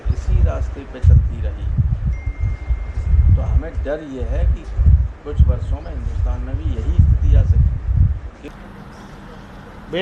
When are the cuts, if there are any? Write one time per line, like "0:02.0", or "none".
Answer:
0:08.4